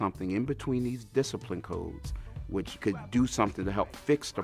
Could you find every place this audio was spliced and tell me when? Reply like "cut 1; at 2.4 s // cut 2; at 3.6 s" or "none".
none